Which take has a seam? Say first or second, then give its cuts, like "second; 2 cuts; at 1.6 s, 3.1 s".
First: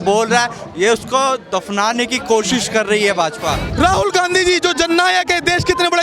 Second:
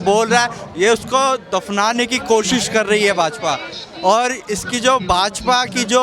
first; 1 cut; at 3.6 s